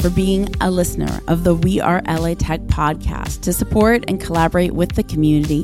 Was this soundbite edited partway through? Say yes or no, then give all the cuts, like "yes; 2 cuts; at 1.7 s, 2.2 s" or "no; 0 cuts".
no; 0 cuts